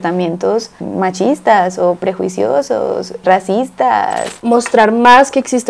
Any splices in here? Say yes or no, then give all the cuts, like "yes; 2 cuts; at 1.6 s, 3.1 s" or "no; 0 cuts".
yes; 1 cut; at 4.3 s